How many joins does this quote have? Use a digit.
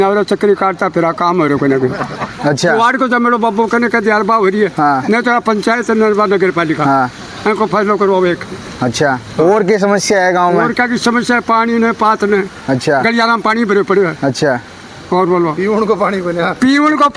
0